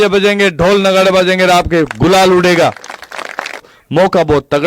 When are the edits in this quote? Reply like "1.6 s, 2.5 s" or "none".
3.8 s